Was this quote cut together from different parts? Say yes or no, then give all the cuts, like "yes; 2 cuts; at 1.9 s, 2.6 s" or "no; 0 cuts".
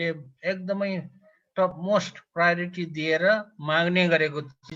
no; 0 cuts